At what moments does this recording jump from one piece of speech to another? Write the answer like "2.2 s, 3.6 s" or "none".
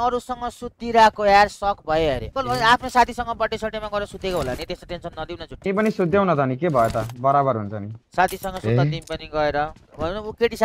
none